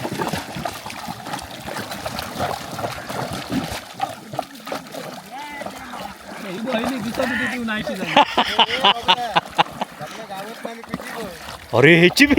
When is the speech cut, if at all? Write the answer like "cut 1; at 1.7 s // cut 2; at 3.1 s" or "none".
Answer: none